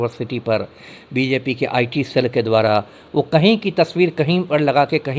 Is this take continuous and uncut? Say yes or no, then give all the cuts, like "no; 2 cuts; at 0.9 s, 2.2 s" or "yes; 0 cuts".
yes; 0 cuts